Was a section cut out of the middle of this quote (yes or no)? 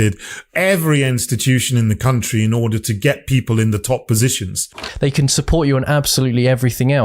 yes